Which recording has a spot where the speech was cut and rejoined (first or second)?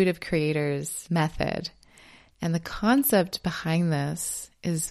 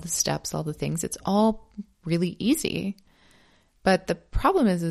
first